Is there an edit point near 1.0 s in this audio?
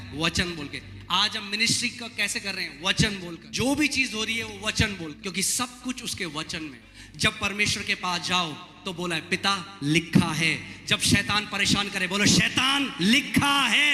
no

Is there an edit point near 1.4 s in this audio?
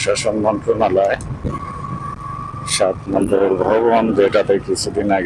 yes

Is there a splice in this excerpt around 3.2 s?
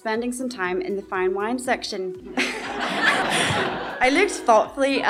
yes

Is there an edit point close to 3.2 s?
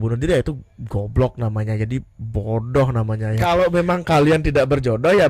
yes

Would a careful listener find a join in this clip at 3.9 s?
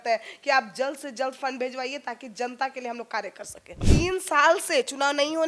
yes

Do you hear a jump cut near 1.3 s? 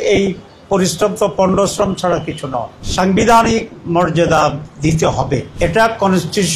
no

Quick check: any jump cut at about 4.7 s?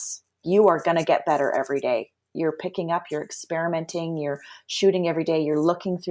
no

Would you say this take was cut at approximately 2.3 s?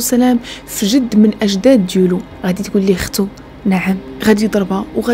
yes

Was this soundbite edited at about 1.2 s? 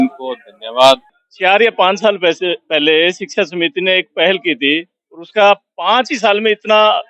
yes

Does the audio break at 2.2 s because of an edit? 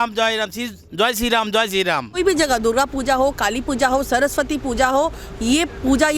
yes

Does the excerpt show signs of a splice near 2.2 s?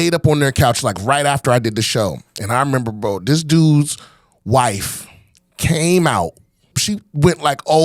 no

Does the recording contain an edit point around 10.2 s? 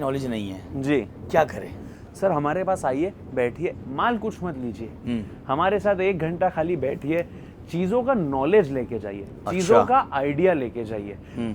no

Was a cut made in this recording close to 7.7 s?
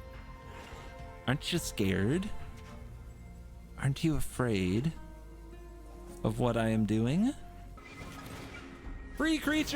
yes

